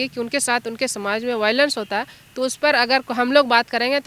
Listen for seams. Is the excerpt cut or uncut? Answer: uncut